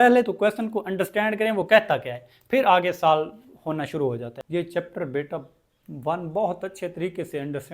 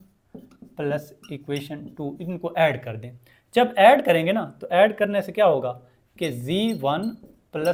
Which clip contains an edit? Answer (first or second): first